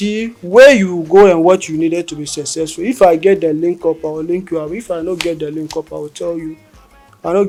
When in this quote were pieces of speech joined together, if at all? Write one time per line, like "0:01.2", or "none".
none